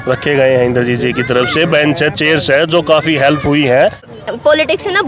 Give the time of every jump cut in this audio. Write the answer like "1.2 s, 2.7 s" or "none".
4.1 s